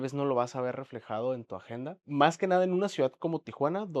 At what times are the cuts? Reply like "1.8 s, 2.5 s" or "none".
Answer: 2.0 s